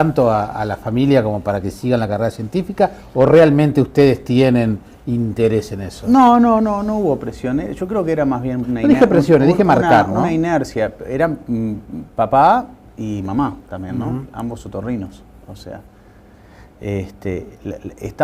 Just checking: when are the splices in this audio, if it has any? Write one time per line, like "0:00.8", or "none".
0:07.3